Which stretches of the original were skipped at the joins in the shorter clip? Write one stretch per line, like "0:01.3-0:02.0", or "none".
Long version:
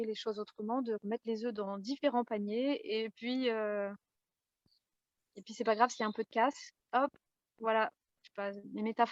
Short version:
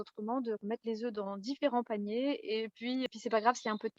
0:03.5-0:05.4